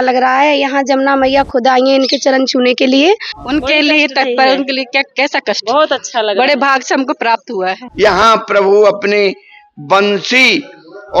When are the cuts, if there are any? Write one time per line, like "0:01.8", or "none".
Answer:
0:03.3
0:07.8

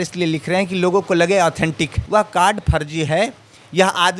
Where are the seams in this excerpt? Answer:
0:01.9

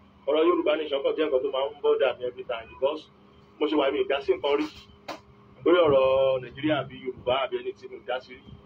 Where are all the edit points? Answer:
0:02.8

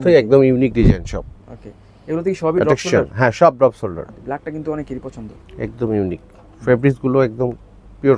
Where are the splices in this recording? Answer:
0:04.1

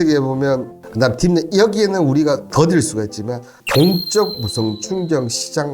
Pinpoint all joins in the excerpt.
0:03.6

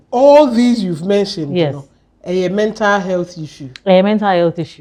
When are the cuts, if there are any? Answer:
none

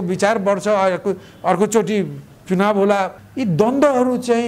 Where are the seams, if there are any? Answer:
0:03.2

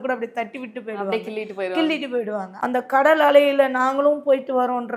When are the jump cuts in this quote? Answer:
0:02.4

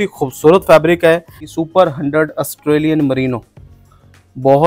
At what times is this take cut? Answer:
0:01.4

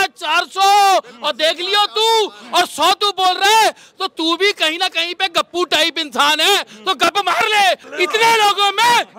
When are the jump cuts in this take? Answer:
0:07.9

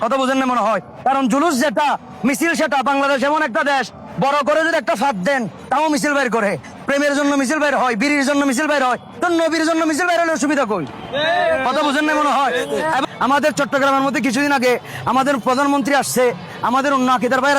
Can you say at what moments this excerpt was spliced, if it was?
0:13.0

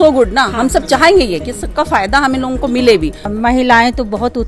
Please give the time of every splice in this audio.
0:03.3

